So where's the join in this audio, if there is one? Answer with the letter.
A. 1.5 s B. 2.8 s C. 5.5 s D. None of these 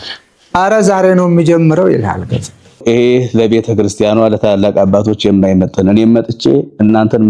B